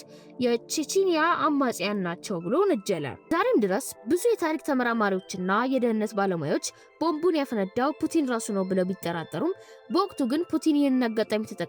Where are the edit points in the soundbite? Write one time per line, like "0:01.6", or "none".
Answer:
0:03.2